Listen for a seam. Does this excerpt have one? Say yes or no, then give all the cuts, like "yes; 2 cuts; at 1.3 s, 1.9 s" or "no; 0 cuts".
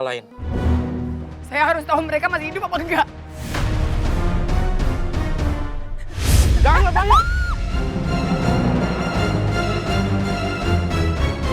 yes; 1 cut; at 1.3 s